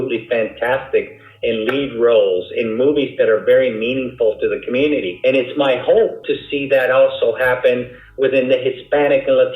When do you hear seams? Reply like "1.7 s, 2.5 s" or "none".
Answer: 5.1 s, 6.3 s